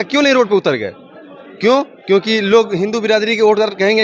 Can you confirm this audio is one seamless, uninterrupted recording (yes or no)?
yes